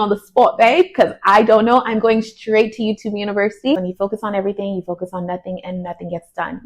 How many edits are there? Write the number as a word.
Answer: one